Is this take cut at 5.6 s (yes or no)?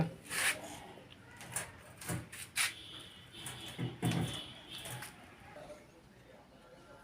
yes